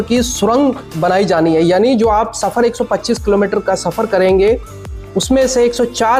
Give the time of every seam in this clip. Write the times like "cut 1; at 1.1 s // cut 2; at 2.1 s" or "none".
none